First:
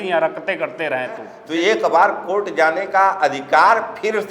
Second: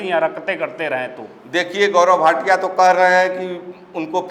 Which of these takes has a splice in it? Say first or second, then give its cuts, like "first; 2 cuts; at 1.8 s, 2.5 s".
first; 1 cut; at 1.4 s